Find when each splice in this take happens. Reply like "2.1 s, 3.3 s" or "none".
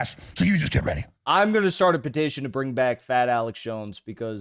1.1 s